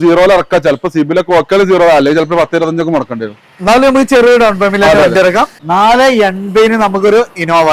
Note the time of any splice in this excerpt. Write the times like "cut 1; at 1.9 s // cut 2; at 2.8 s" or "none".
cut 1; at 5.6 s

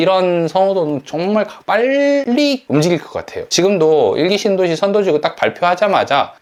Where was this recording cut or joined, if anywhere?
none

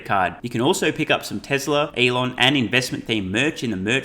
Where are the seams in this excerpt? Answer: cut 1; at 1.9 s

